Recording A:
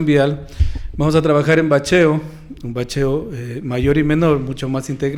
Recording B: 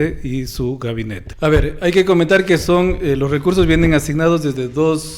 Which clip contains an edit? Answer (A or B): B